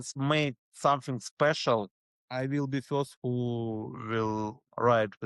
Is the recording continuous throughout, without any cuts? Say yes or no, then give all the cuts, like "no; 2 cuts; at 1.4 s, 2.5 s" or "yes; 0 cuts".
yes; 0 cuts